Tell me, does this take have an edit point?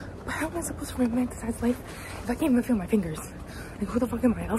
no; 0 cuts

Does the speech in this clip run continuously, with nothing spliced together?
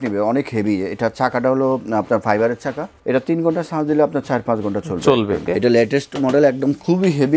no; 2 cuts; at 3.0 s, 5.4 s

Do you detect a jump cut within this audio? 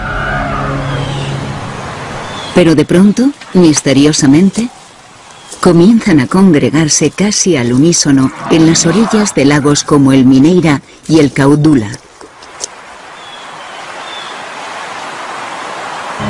yes; 1 cut; at 5.1 s

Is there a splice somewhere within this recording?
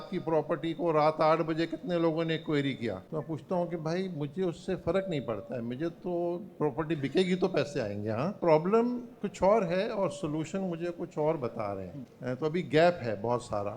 yes; 1 cut; at 8.4 s

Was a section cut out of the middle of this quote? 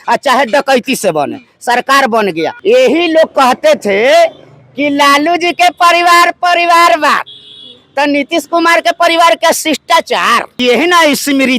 yes; 2 cuts; at 2.6 s, 10.6 s

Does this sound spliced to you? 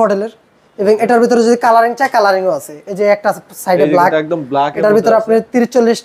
no; 0 cuts

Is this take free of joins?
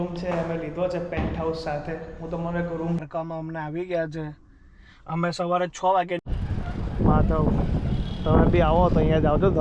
no; 2 cuts; at 3.0 s, 6.3 s

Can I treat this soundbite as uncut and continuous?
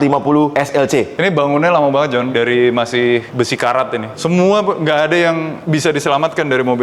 no; 3 cuts; at 1.1 s, 2.3 s, 4.1 s

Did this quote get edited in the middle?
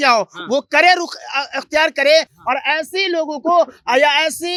no; 0 cuts

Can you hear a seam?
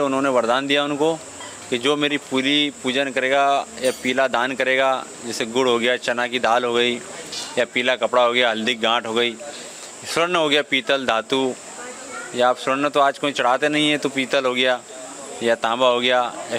no; 0 cuts

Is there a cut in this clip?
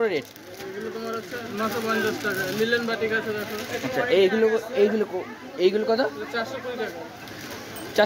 no; 0 cuts

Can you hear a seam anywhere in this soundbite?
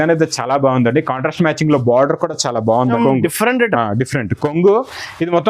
yes; 1 cut; at 2.9 s

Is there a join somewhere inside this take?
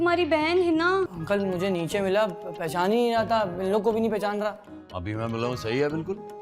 yes; 1 cut; at 1.2 s

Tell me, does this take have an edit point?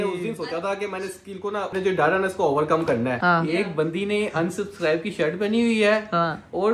yes; 2 cuts; at 1.7 s, 3.2 s

